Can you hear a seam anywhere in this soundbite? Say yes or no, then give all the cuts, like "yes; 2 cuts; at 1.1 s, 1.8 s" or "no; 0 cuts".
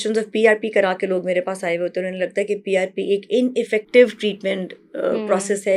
no; 0 cuts